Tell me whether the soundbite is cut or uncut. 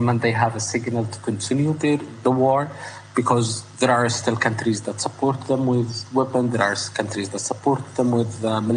uncut